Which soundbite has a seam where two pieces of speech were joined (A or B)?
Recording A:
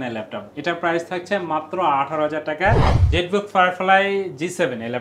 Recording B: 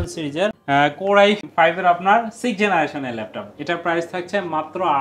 A